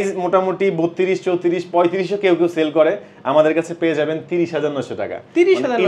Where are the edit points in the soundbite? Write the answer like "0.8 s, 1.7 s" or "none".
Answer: none